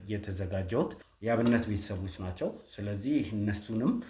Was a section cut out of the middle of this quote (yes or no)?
yes